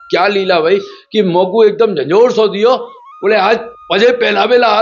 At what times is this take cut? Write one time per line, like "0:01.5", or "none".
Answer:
0:03.8